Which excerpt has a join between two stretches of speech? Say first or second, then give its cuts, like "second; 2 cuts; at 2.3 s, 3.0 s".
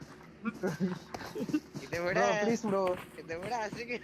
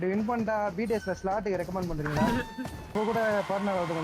second; 1 cut; at 3.0 s